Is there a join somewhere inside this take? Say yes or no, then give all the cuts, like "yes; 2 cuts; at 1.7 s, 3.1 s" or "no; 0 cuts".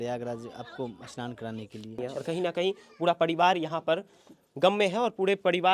yes; 1 cut; at 2.0 s